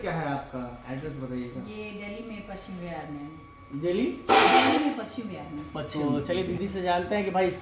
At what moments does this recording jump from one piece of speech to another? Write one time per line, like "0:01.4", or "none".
0:05.9